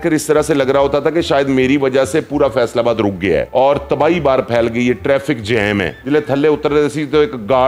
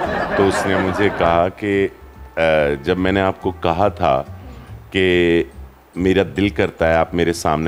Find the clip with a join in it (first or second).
first